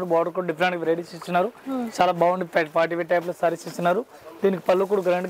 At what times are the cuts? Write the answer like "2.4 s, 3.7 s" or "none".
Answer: none